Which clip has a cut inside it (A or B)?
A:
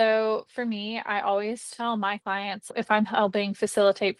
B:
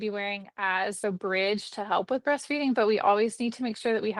B